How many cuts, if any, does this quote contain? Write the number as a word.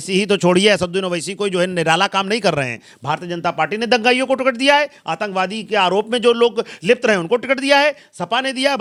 zero